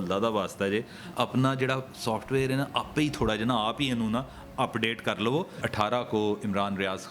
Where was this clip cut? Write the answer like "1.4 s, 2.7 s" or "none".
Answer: 5.6 s